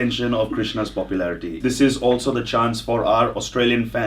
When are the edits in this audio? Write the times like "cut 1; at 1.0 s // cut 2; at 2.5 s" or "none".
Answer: cut 1; at 1.6 s